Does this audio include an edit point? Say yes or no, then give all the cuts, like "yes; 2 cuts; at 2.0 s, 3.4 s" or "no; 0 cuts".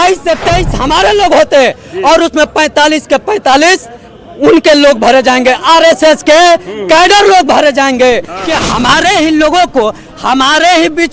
yes; 1 cut; at 8.3 s